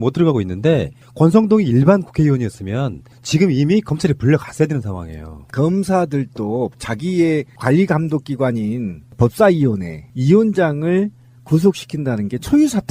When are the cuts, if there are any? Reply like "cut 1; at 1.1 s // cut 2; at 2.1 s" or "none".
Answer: none